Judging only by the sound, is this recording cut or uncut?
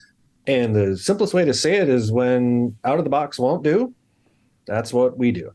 uncut